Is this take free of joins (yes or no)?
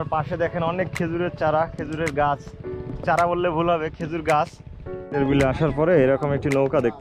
no